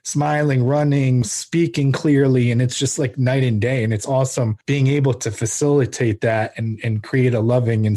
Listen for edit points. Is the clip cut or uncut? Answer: cut